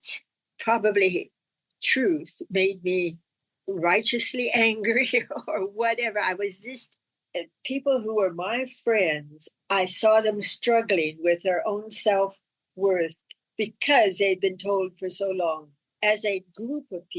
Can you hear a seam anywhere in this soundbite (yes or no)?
no